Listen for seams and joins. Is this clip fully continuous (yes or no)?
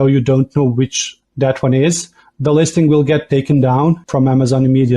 no